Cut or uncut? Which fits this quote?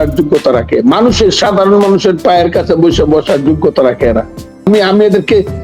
cut